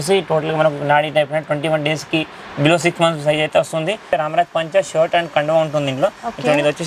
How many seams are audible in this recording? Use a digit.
1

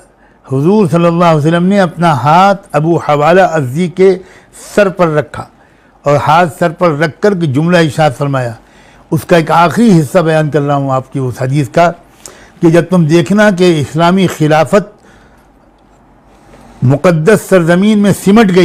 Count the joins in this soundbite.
0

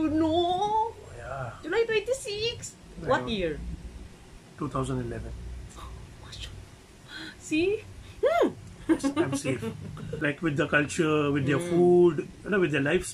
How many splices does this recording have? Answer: 1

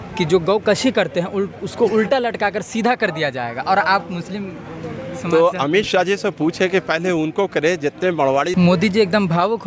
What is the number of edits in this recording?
1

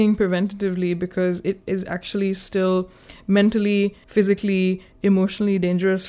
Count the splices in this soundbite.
1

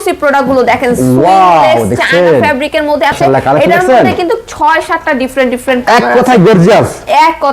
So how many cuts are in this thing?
1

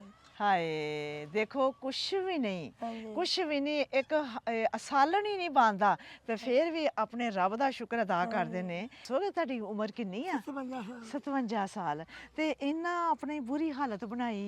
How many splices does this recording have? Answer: 1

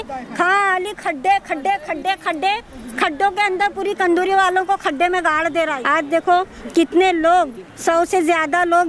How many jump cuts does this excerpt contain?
1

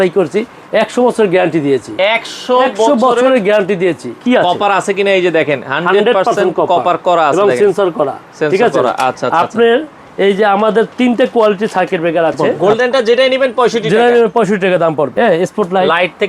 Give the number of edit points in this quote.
3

